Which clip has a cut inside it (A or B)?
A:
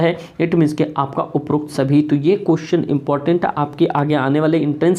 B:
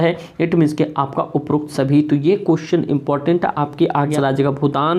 B